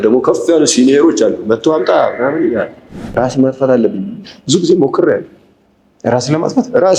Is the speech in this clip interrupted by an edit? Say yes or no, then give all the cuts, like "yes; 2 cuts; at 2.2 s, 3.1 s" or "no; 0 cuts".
yes; 1 cut; at 3.0 s